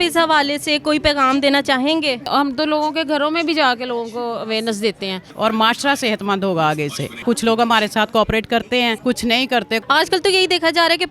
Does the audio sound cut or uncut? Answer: cut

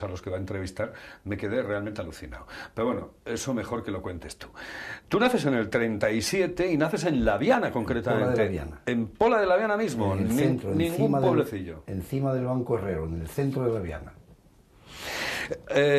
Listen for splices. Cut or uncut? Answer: cut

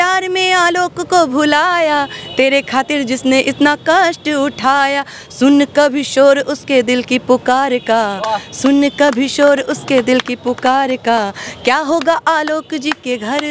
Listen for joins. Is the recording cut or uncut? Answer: uncut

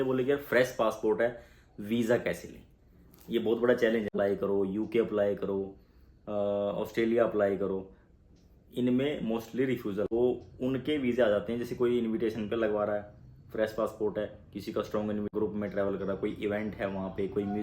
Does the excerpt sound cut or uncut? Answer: cut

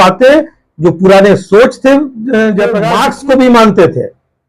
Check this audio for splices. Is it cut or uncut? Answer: cut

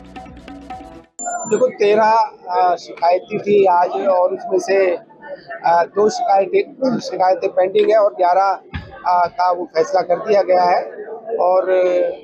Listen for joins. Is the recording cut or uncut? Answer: cut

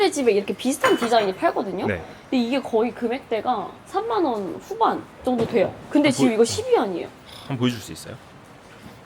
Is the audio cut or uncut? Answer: uncut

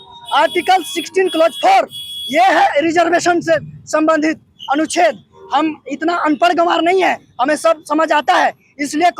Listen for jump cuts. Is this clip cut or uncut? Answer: uncut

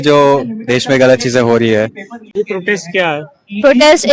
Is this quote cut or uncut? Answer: cut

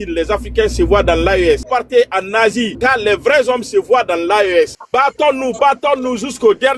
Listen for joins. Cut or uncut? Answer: cut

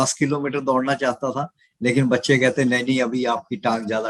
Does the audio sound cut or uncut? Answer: uncut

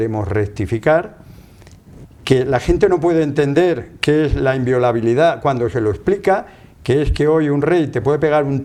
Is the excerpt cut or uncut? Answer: uncut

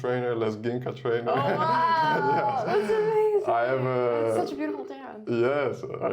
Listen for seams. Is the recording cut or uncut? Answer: uncut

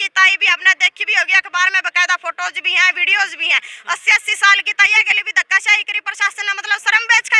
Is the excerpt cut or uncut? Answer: uncut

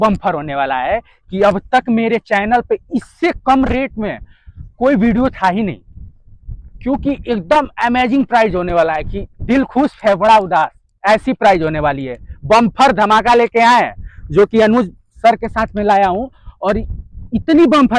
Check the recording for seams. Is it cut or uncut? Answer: uncut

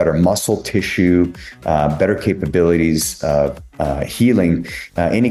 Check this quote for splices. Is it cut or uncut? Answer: uncut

